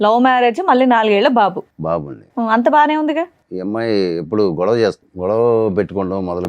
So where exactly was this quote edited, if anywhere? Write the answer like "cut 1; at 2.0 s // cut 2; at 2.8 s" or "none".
cut 1; at 3.4 s // cut 2; at 5.1 s